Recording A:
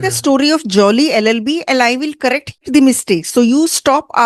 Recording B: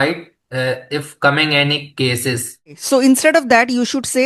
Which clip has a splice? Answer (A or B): B